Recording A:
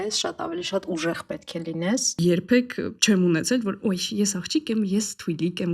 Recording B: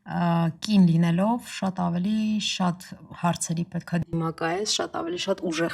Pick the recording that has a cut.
A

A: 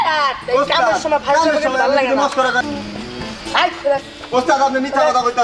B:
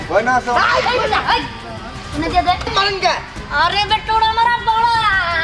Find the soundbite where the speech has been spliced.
A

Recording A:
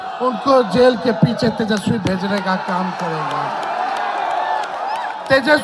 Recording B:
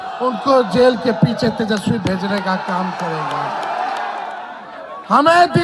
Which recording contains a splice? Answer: B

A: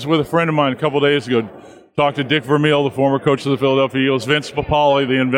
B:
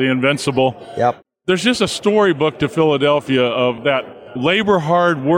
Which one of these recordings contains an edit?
B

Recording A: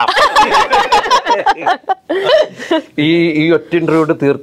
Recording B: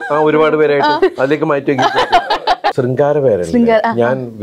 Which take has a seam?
B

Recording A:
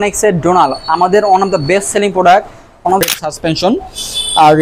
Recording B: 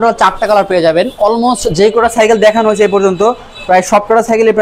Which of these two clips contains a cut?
A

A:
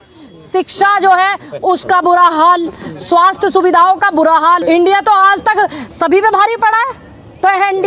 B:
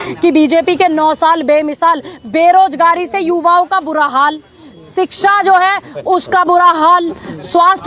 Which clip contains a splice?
A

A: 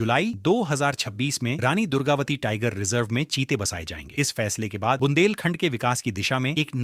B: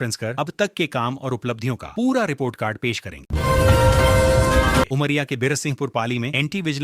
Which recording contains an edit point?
B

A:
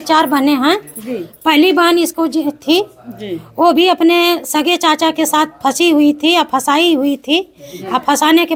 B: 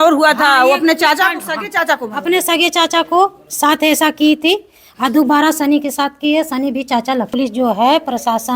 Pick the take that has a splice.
B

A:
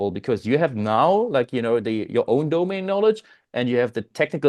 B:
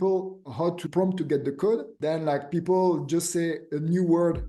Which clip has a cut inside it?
B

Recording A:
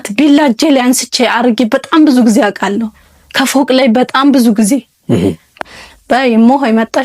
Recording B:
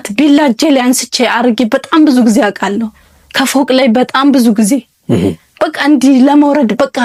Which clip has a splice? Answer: A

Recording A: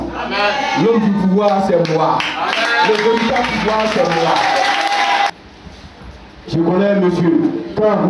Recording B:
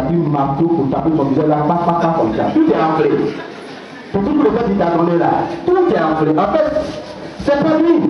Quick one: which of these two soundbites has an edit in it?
A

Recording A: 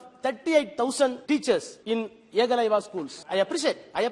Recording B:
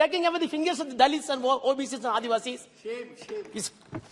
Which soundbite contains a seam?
A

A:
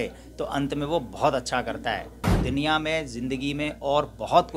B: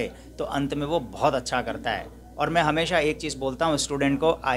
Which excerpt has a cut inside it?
A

